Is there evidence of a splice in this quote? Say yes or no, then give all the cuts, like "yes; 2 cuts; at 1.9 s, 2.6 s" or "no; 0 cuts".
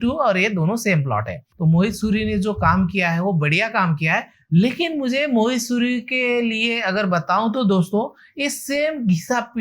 yes; 1 cut; at 1.5 s